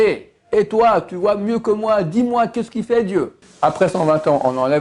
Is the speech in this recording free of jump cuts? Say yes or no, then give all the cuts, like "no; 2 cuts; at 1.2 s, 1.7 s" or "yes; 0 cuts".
no; 1 cut; at 3.4 s